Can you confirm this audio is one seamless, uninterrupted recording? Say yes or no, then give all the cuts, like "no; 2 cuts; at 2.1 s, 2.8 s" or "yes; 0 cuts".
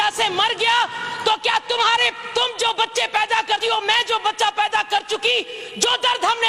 yes; 0 cuts